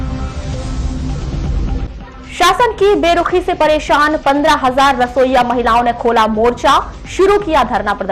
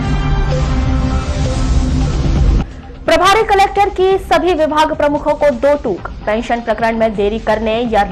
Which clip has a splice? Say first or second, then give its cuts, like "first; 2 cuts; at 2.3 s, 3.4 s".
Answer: first; 1 cut; at 1.8 s